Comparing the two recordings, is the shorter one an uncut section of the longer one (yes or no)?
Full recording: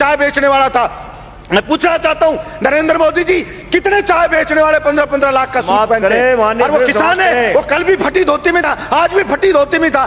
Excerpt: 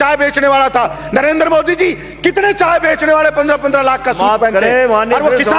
no